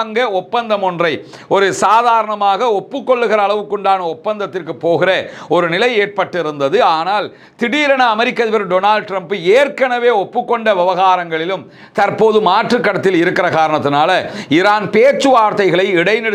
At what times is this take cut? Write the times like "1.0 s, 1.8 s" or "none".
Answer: none